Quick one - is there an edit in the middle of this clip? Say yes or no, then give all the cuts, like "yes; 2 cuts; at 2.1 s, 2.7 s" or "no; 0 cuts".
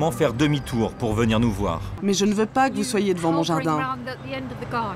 yes; 1 cut; at 1.9 s